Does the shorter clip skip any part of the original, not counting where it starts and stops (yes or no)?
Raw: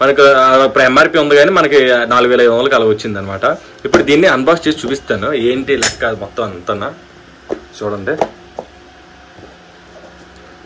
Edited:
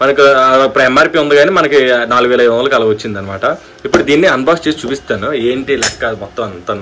no